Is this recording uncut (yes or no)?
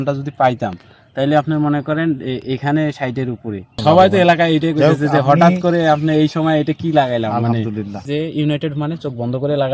no